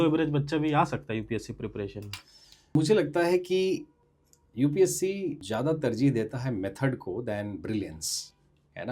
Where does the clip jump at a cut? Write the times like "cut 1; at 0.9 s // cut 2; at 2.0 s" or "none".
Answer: cut 1; at 2.8 s // cut 2; at 4.0 s // cut 3; at 5.4 s

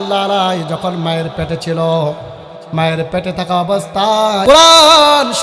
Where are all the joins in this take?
cut 1; at 4.4 s

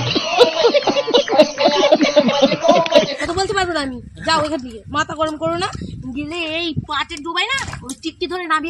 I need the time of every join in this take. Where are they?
cut 1; at 3.2 s

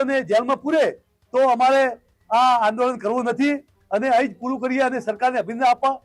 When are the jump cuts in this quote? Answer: none

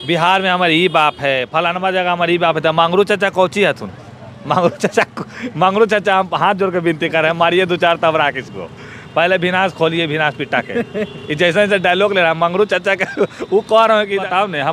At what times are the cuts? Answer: none

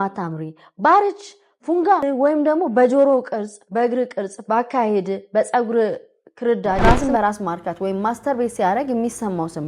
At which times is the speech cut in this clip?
cut 1; at 2.0 s // cut 2; at 6.8 s

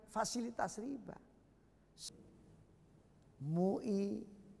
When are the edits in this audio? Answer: cut 1; at 2.0 s

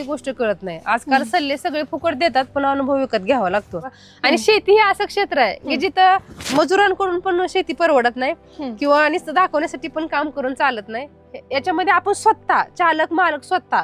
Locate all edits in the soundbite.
cut 1; at 4.0 s

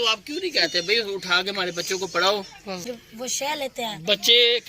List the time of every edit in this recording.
cut 1; at 2.9 s

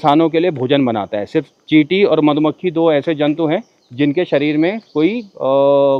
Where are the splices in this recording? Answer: none

